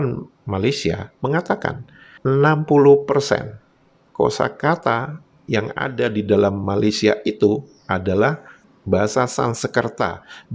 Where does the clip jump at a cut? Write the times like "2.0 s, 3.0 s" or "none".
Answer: none